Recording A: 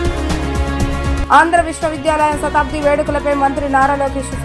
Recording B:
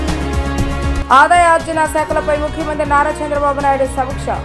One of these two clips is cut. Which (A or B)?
B